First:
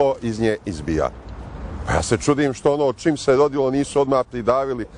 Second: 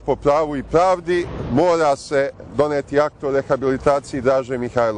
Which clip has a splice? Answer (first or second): first